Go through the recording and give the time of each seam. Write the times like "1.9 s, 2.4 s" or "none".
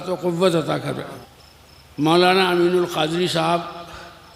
1.2 s